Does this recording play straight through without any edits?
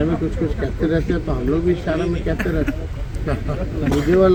yes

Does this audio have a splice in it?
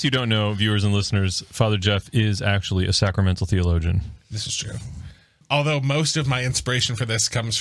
yes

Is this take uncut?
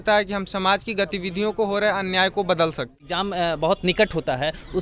no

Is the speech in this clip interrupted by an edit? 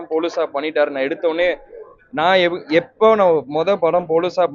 no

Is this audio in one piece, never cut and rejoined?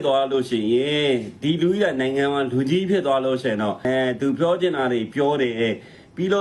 yes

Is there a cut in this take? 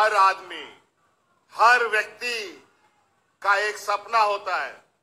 no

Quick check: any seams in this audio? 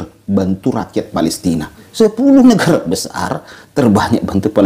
yes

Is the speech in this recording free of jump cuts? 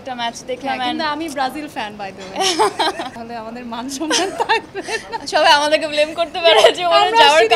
no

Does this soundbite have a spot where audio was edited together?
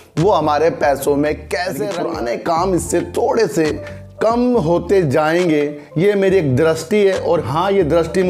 yes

